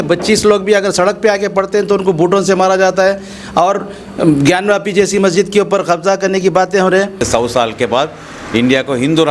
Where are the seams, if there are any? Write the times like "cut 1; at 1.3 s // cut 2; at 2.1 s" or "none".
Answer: cut 1; at 7.2 s